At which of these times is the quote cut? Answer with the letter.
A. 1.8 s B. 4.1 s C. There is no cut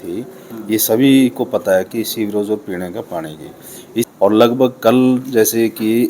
B